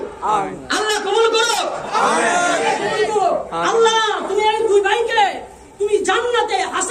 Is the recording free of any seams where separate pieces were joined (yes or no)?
no